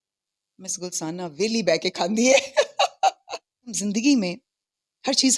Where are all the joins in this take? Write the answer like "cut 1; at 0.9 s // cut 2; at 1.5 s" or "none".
cut 1; at 3.8 s